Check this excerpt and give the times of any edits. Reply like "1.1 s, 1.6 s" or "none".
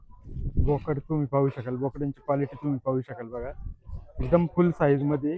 none